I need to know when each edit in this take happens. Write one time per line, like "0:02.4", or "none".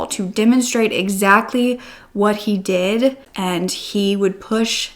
0:03.3